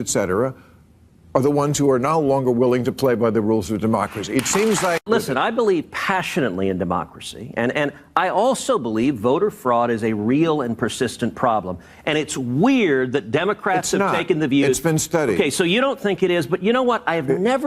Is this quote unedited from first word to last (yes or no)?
no